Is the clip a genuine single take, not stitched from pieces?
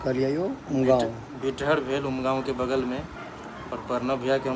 yes; 0 cuts

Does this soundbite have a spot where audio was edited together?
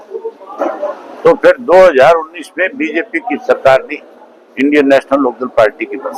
no; 0 cuts

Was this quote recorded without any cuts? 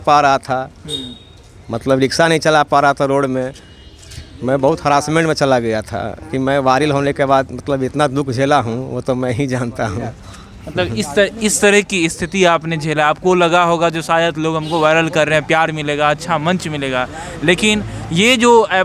yes; 0 cuts

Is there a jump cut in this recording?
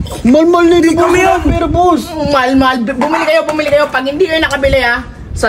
no; 0 cuts

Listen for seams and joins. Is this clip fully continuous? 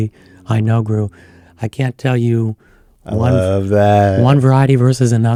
yes; 0 cuts

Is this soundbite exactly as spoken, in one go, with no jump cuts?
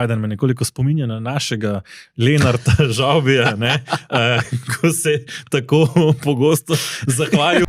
yes; 0 cuts

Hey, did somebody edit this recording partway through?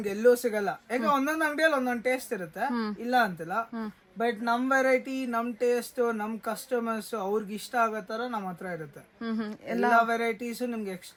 no; 0 cuts

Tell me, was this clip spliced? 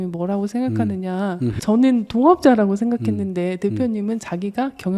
yes; 1 cut; at 1.6 s

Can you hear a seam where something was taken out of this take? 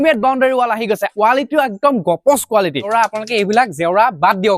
yes; 2 cuts; at 1.1 s, 2.9 s

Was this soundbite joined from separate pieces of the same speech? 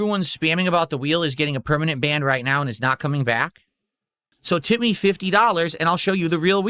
yes; 1 cut; at 4.3 s

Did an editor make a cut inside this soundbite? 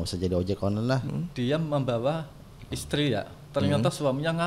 yes; 1 cut; at 1.0 s

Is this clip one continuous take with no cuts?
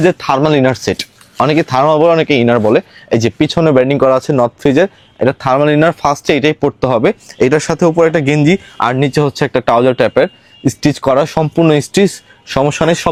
yes; 0 cuts

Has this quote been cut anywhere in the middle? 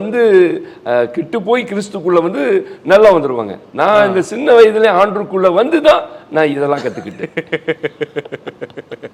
no; 0 cuts

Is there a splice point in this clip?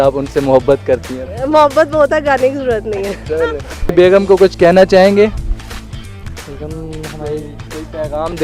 yes; 1 cut; at 3.9 s

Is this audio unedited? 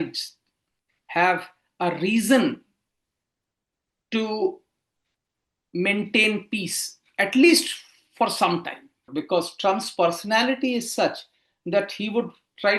no; 1 cut; at 9.1 s

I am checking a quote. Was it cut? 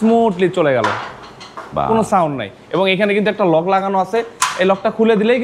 no; 0 cuts

